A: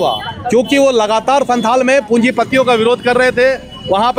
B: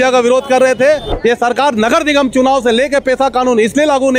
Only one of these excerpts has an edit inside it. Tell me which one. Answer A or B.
B